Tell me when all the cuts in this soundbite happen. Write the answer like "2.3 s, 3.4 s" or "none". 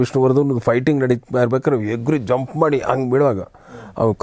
none